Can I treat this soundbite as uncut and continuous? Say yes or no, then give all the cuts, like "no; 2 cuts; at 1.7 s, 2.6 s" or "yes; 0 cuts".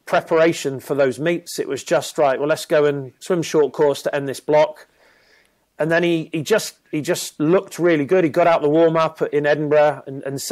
yes; 0 cuts